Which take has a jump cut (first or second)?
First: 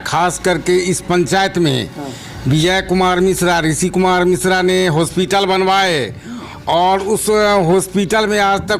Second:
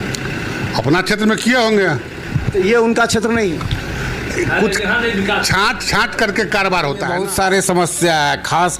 second